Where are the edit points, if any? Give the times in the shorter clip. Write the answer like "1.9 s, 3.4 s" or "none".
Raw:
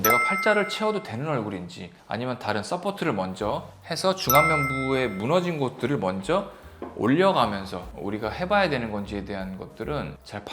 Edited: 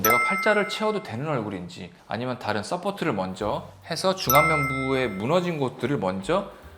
none